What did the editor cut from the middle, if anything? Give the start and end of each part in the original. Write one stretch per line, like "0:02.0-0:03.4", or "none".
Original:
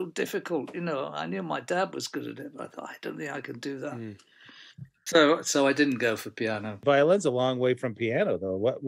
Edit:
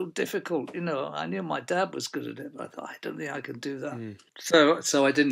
0:04.3-0:04.9